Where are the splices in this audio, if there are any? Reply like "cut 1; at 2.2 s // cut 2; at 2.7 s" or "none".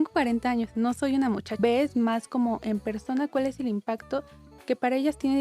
cut 1; at 1.6 s